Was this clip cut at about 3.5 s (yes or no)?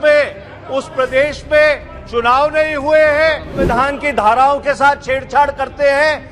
yes